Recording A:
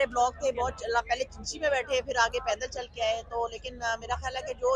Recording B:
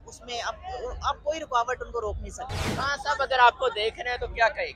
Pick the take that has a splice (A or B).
B